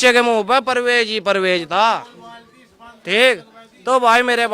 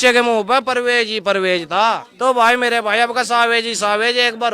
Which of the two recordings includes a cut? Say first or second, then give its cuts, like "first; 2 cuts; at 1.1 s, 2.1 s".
second; 1 cut; at 2.1 s